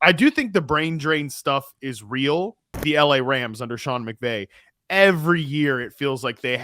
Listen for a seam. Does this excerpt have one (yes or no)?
yes